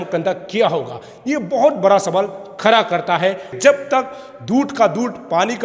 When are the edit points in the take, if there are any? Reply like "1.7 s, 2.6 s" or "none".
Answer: 3.5 s